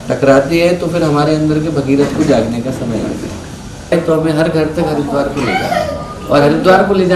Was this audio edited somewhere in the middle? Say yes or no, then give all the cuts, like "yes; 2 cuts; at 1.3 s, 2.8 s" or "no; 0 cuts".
yes; 1 cut; at 3.9 s